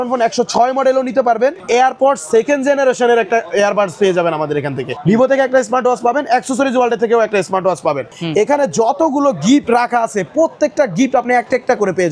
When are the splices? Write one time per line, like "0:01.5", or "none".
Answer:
0:01.6
0:04.8
0:08.1